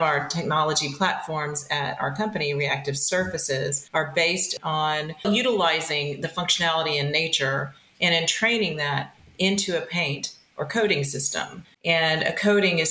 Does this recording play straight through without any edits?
no; 3 cuts; at 3.8 s, 5.2 s, 11.7 s

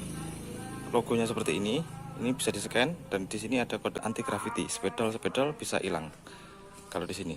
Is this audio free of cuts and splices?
no; 1 cut; at 4.0 s

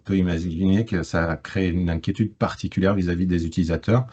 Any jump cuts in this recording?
no; 0 cuts

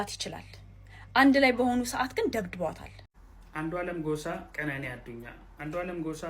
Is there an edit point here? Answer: yes; 1 cut; at 3.1 s

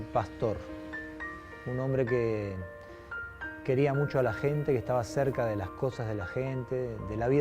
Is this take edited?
no; 0 cuts

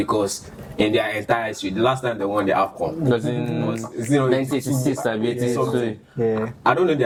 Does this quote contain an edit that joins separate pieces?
no; 0 cuts

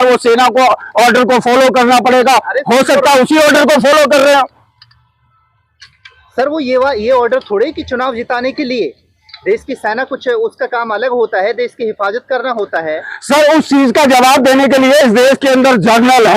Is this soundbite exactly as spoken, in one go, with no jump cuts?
yes; 0 cuts

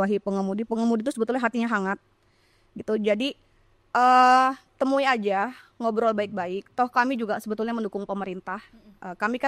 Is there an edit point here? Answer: no; 0 cuts

